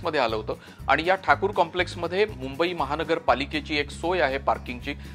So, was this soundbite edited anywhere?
no; 0 cuts

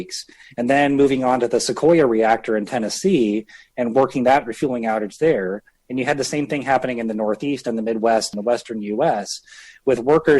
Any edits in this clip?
yes; 1 cut; at 8.3 s

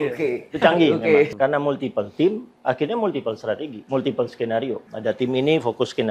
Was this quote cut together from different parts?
yes; 3 cuts; at 1.3 s, 3.7 s, 4.9 s

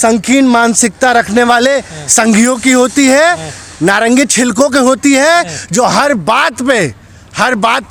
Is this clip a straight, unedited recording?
yes; 0 cuts

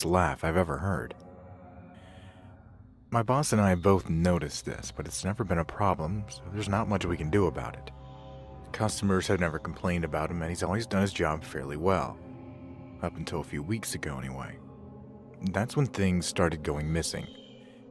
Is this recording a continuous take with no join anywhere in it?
no; 1 cut; at 5.2 s

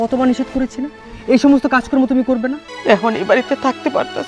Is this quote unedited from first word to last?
no; 1 cut; at 2.7 s

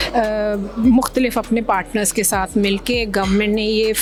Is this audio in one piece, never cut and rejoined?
yes; 0 cuts

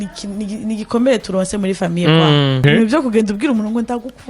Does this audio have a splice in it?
yes; 1 cut; at 2.6 s

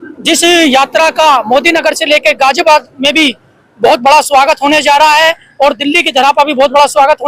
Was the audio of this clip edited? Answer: no; 0 cuts

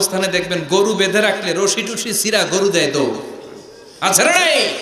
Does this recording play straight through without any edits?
yes; 0 cuts

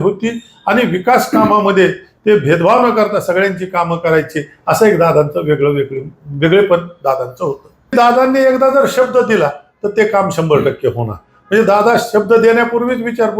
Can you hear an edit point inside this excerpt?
yes; 1 cut; at 7.9 s

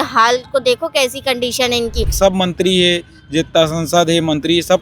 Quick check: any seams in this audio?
yes; 1 cut; at 2.1 s

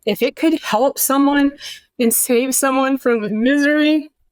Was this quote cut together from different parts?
no; 0 cuts

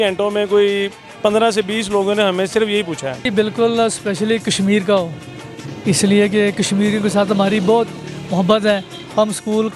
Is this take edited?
yes; 1 cut; at 3.3 s

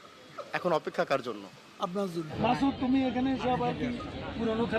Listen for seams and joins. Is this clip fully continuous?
no; 1 cut; at 2.3 s

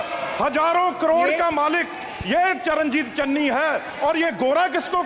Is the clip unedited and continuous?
yes; 0 cuts

